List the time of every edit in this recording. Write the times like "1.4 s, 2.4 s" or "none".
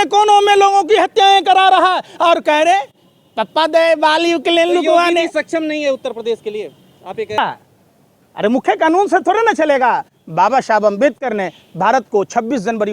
7.4 s